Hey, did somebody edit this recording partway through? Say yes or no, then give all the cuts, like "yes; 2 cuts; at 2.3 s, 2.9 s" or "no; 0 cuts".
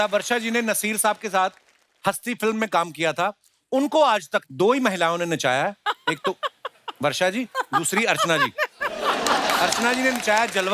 no; 0 cuts